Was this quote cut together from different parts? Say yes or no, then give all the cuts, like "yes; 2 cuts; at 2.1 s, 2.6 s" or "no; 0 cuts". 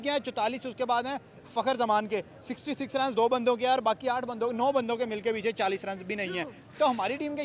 no; 0 cuts